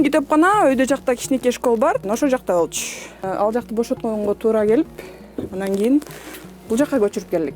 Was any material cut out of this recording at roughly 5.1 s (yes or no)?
no